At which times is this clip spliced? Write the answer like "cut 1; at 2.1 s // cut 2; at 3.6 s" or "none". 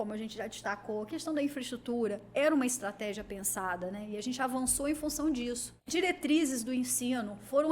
cut 1; at 5.7 s